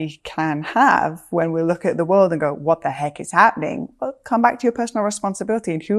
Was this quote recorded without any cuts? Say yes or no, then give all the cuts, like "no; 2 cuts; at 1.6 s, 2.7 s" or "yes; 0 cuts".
yes; 0 cuts